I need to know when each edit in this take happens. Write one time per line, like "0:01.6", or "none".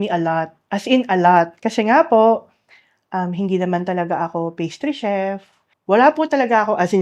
none